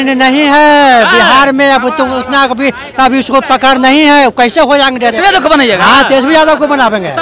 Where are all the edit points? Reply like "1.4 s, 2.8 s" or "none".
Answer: 5.2 s